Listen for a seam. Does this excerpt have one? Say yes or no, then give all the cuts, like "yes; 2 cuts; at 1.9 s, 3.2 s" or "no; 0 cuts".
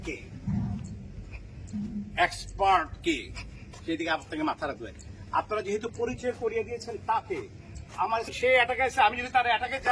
yes; 1 cut; at 8.3 s